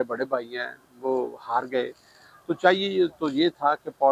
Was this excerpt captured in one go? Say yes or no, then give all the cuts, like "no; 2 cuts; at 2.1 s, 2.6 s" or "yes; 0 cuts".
yes; 0 cuts